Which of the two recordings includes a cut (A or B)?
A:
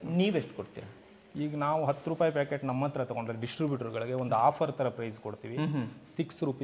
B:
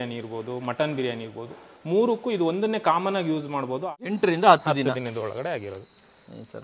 B